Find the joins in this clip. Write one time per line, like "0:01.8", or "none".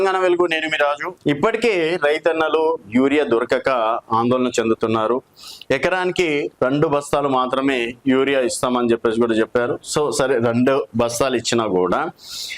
0:01.1